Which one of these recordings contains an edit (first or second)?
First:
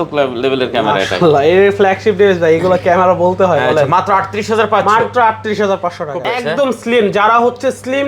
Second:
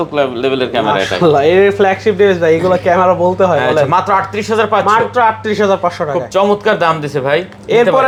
first